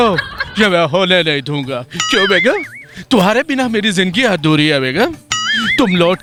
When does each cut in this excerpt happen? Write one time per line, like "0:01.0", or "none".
none